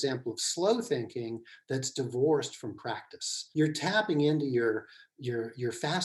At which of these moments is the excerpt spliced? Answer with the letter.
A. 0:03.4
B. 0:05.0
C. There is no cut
A